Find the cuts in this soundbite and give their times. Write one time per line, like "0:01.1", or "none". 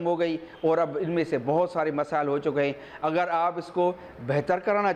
none

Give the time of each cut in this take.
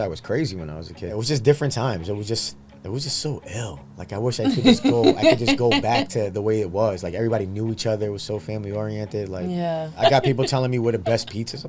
0:01.2
0:10.0

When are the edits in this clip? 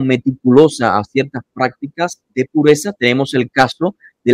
0:02.2

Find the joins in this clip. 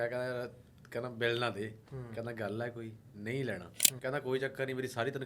0:03.9

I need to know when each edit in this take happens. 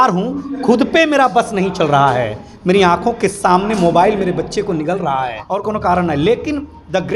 0:05.4

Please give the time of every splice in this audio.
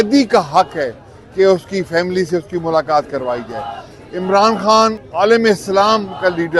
0:05.0

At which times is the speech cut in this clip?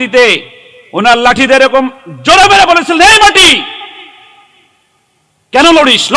none

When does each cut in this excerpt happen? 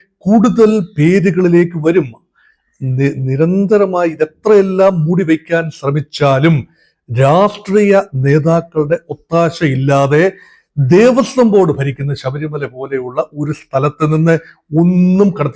none

